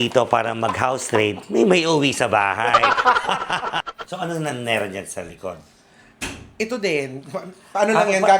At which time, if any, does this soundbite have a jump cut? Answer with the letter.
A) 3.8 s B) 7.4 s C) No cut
A